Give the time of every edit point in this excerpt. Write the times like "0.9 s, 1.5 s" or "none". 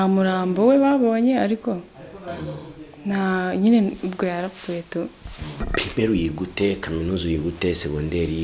5.6 s